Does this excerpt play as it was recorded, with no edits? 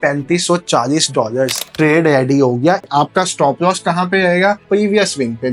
no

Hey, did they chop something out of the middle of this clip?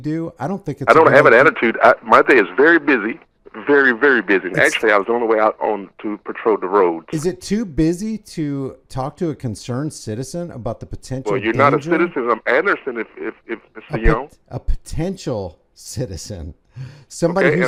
no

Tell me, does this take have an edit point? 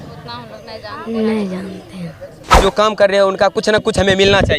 yes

